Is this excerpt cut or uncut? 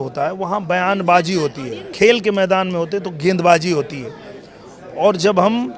cut